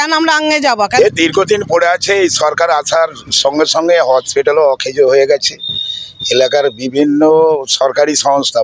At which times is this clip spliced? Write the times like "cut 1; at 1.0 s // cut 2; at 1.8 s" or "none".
cut 1; at 0.9 s